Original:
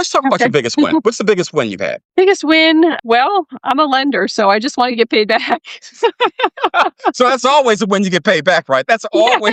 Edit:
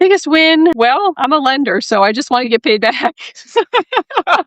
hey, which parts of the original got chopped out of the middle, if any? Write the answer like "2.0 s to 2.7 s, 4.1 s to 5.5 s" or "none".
3.1 s to 3.4 s